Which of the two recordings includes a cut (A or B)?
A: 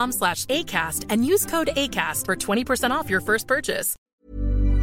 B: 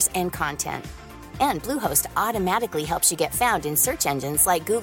A